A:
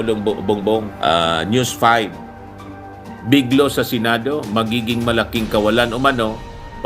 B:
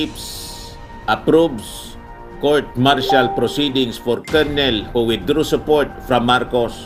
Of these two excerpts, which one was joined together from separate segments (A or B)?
A